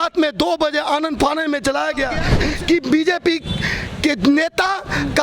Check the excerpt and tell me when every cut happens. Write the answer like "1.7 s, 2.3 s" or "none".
2.3 s